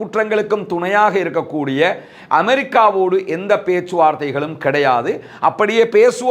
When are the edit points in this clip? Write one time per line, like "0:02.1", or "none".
none